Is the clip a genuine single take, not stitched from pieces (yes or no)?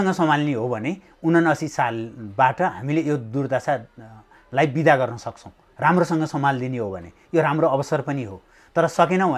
yes